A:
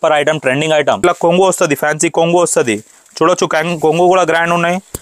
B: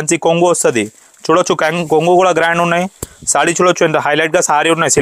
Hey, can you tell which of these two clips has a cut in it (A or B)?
A